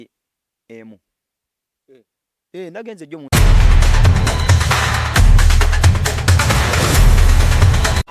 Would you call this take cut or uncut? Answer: cut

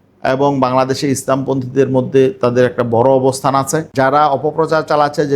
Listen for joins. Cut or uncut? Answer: cut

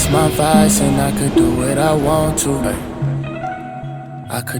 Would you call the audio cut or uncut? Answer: uncut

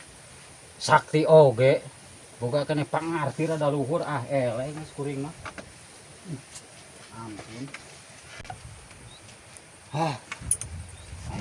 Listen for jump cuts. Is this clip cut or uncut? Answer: uncut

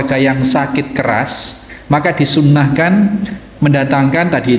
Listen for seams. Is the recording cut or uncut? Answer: uncut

